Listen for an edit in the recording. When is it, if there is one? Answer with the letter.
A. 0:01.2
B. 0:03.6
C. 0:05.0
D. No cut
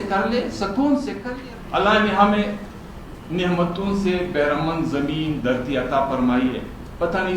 A